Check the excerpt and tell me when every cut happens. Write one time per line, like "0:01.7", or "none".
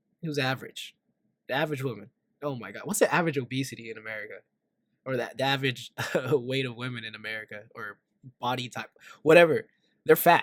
none